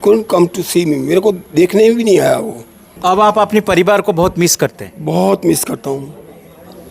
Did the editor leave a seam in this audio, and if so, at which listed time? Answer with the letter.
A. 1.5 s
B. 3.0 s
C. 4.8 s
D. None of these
B